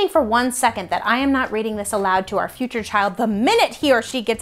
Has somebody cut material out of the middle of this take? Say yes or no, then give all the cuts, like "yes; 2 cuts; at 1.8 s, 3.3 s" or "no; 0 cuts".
no; 0 cuts